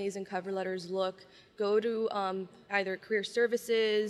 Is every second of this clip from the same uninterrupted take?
yes; 0 cuts

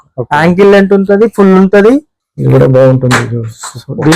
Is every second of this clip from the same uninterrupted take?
no; 1 cut; at 2.1 s

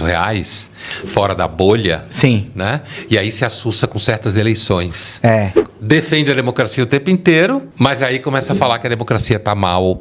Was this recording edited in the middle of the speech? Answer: yes; 2 cuts; at 5.6 s, 7.7 s

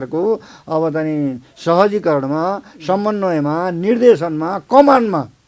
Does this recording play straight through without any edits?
yes; 0 cuts

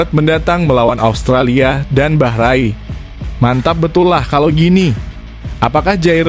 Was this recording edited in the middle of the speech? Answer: no; 0 cuts

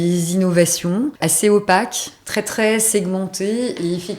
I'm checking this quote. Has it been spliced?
yes; 1 cut; at 1.2 s

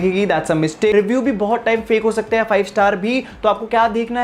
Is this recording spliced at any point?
yes; 1 cut; at 0.9 s

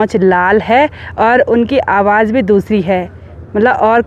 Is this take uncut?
yes; 0 cuts

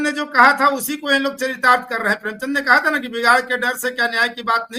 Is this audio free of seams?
yes; 0 cuts

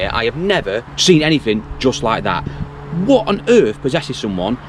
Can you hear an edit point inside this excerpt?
yes; 1 cut; at 0.9 s

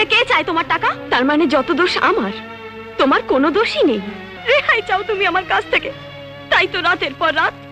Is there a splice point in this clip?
yes; 2 cuts; at 1.0 s, 4.3 s

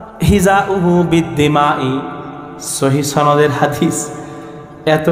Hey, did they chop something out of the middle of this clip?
no; 0 cuts

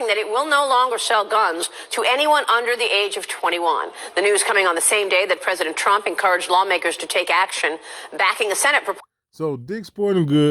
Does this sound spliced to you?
no; 0 cuts

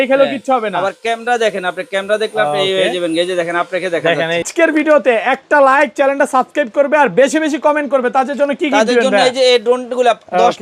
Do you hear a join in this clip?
yes; 1 cut; at 4.5 s

